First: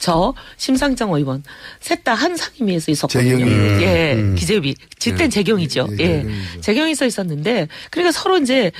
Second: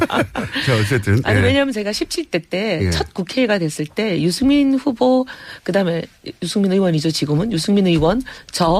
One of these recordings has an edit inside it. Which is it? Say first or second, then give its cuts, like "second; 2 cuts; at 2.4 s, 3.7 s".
second; 1 cut; at 3.3 s